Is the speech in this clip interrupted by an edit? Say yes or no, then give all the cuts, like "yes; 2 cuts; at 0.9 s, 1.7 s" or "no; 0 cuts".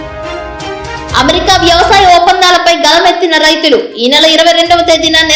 yes; 1 cut; at 1.1 s